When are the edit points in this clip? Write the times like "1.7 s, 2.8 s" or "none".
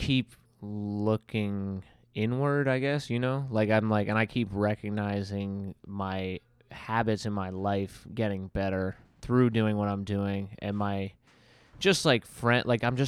none